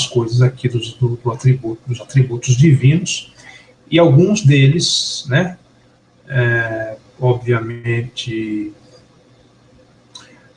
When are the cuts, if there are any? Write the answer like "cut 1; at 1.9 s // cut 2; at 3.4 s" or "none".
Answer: none